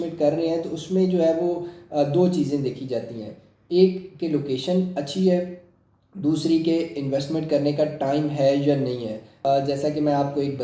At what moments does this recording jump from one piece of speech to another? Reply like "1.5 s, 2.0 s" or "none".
9.4 s